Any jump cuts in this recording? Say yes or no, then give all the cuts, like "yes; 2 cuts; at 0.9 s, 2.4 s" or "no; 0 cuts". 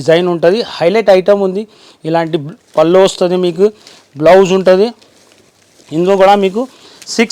no; 0 cuts